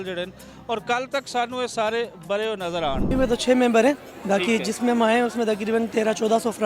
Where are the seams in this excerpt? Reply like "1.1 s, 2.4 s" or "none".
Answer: 3.1 s